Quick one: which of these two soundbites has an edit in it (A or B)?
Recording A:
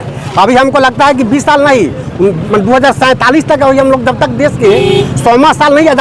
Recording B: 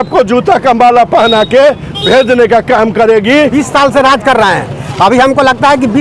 B